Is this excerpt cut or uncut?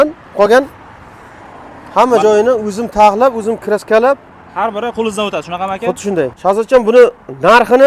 cut